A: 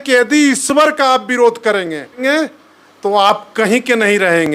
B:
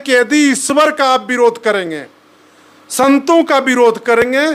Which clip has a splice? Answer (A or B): A